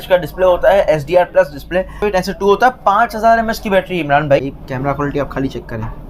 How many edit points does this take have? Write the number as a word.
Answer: two